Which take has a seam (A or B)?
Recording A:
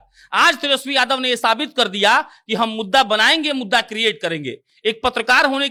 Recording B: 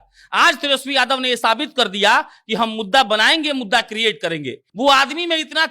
B